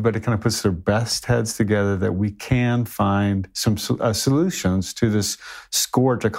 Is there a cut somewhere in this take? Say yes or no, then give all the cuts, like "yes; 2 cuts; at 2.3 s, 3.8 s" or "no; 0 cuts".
no; 0 cuts